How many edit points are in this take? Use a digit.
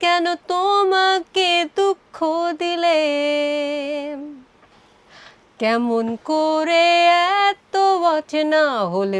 0